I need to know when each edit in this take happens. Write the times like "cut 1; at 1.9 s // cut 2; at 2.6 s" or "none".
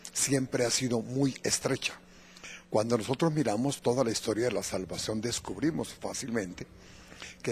cut 1; at 6.2 s